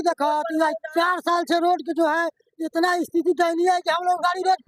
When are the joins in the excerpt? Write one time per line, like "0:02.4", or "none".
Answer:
none